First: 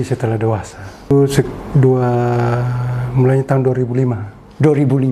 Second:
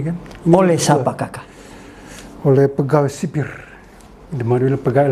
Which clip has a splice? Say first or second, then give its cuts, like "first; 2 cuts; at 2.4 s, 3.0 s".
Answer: first; 1 cut; at 1.1 s